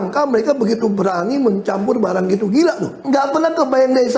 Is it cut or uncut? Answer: cut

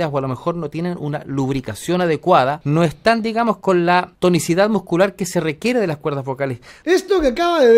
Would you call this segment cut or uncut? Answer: cut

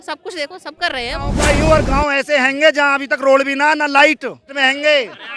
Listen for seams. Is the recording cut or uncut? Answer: cut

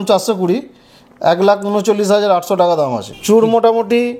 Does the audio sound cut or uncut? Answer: cut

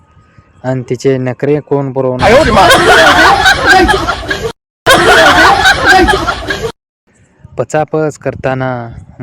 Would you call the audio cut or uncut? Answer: cut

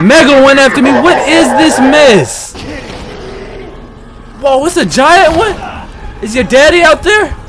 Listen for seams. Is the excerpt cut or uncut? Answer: cut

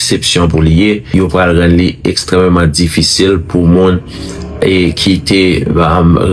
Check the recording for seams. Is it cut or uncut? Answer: cut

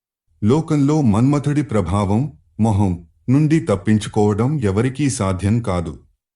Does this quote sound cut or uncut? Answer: uncut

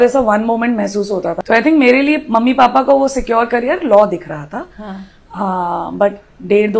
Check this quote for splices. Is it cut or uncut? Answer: cut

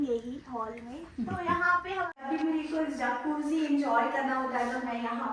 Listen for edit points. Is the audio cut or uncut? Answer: cut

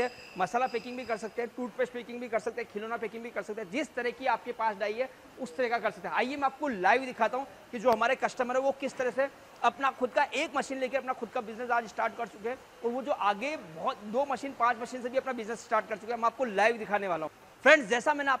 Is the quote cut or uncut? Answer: uncut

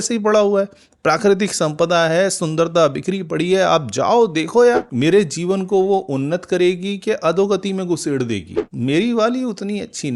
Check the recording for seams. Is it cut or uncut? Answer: cut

